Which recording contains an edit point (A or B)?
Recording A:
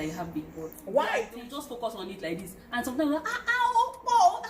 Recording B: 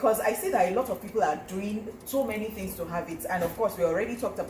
A